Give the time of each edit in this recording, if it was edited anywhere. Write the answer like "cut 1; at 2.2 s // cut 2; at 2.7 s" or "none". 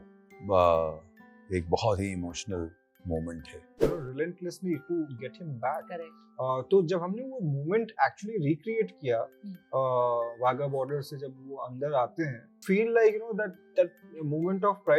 cut 1; at 3.9 s // cut 2; at 12.6 s

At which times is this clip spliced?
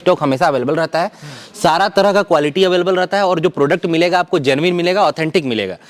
none

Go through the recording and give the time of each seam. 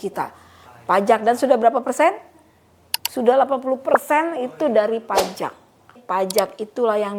cut 1; at 6.0 s

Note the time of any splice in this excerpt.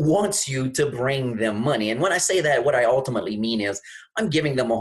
none

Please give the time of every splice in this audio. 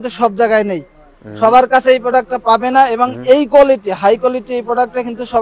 none

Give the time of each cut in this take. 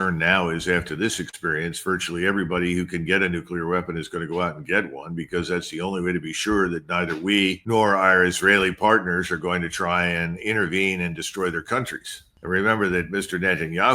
none

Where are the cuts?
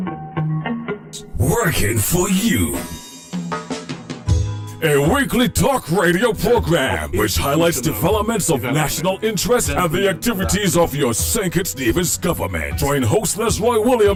none

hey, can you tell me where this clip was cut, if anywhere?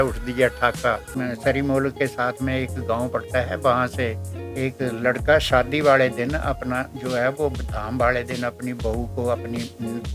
cut 1; at 1.1 s

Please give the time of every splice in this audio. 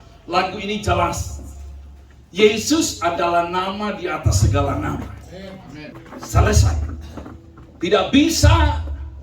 cut 1; at 5.9 s

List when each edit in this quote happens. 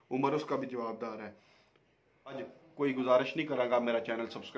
cut 1; at 2.4 s

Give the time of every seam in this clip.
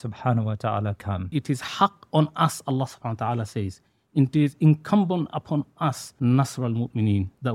cut 1; at 1.3 s // cut 2; at 6.1 s

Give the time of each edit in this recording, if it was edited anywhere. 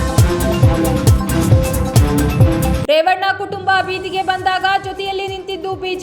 cut 1; at 1.1 s // cut 2; at 2.8 s

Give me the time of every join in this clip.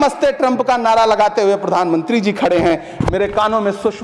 none

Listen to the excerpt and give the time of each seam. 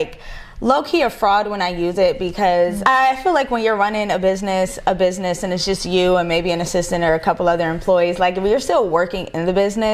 cut 1; at 2.8 s

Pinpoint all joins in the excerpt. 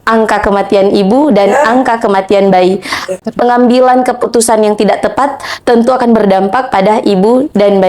cut 1; at 3.2 s

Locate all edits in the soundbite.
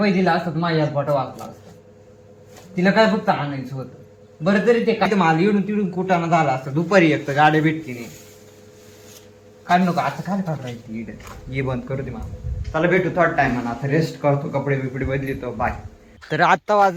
none

